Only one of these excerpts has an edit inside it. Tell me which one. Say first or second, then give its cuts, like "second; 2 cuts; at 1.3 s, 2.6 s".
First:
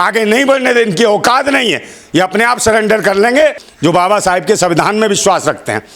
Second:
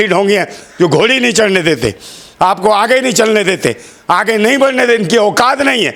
first; 1 cut; at 3.7 s